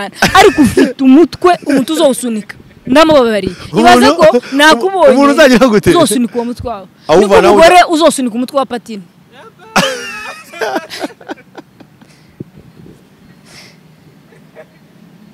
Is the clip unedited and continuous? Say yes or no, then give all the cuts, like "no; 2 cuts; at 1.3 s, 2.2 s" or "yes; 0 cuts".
yes; 0 cuts